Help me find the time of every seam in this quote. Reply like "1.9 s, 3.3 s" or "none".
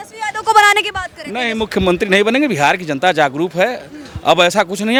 none